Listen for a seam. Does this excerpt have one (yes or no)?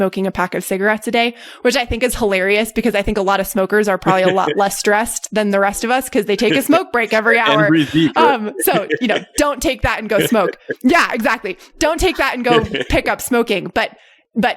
no